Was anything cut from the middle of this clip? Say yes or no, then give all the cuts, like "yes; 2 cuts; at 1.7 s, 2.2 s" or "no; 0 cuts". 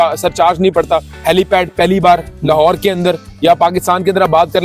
yes; 1 cut; at 1.1 s